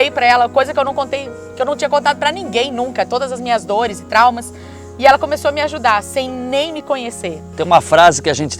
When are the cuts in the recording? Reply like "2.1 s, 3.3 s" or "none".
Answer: 7.5 s